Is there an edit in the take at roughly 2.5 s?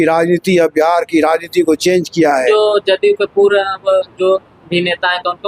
yes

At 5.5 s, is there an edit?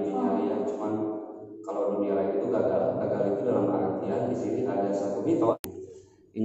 yes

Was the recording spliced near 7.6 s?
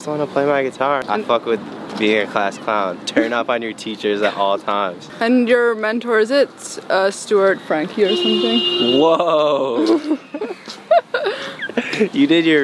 no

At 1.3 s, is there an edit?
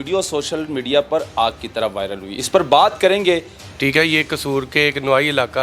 no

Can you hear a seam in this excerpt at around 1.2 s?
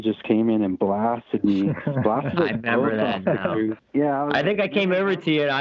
no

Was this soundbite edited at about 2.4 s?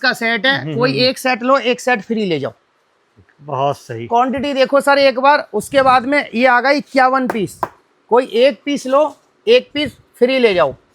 no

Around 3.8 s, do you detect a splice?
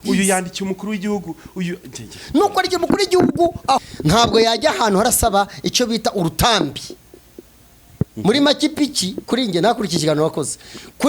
yes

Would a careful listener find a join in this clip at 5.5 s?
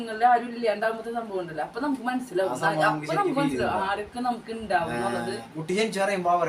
yes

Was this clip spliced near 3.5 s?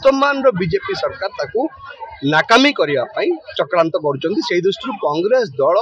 no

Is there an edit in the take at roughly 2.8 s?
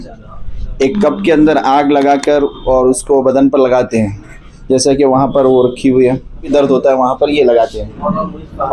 no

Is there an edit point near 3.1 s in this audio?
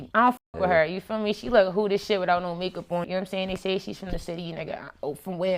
yes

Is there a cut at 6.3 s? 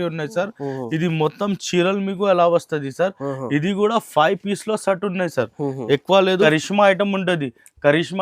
yes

